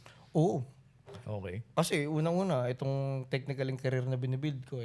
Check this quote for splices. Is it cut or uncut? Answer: uncut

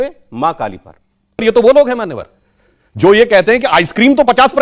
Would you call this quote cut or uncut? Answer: cut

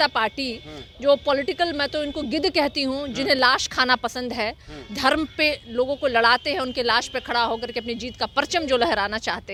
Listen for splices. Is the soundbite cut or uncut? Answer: uncut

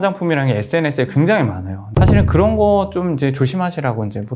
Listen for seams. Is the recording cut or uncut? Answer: cut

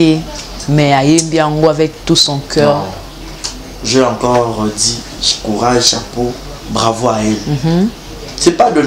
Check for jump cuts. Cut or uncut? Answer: uncut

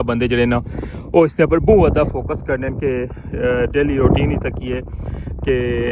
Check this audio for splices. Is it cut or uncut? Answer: uncut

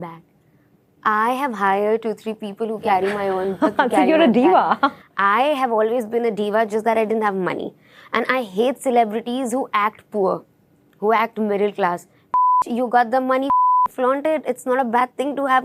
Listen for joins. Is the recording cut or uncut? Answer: uncut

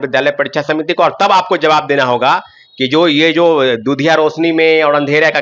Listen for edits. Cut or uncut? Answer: uncut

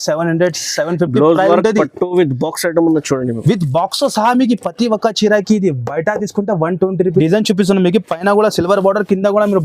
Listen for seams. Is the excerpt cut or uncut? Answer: cut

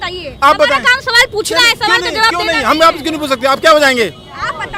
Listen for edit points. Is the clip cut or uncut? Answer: uncut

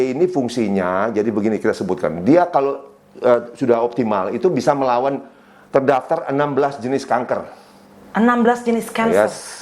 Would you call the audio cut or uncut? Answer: uncut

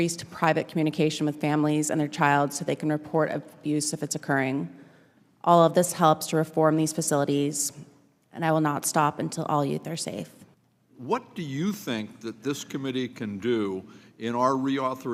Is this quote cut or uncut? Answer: uncut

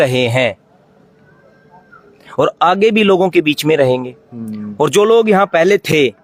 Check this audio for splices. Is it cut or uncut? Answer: uncut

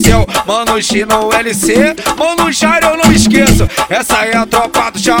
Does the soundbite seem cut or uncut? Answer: uncut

